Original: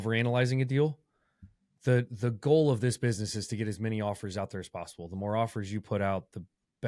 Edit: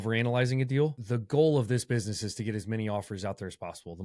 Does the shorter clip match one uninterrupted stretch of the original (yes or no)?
no